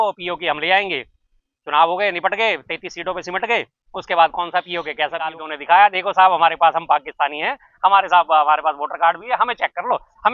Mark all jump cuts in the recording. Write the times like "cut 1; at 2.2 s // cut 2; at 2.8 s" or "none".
cut 1; at 5.5 s